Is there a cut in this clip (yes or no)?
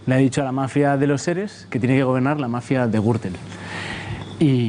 no